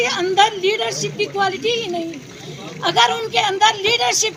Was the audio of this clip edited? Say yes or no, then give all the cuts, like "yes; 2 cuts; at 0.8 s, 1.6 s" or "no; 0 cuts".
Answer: no; 0 cuts